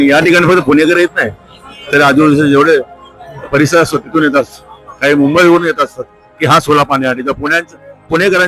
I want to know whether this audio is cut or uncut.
uncut